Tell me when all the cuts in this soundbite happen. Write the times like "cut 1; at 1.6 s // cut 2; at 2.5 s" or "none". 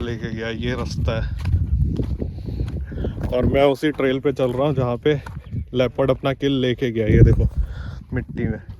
none